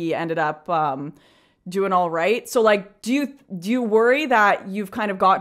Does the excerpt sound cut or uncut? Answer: cut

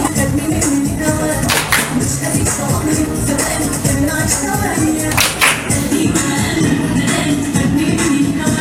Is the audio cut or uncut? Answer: uncut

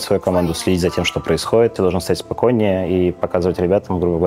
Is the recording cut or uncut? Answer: cut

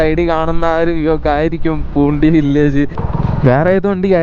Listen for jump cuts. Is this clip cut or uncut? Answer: cut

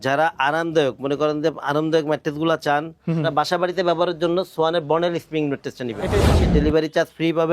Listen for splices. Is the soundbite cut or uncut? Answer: cut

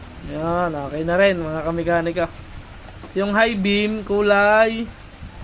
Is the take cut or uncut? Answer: uncut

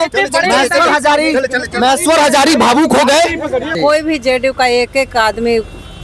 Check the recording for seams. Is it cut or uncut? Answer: cut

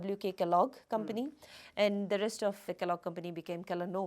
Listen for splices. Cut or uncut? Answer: cut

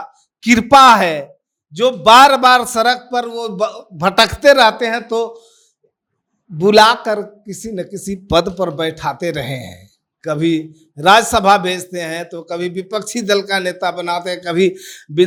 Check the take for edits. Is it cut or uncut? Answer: uncut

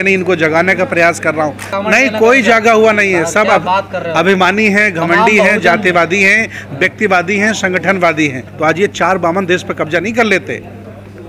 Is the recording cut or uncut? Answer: cut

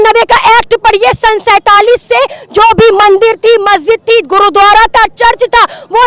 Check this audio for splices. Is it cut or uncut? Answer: uncut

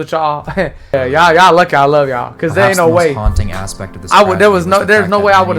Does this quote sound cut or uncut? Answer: cut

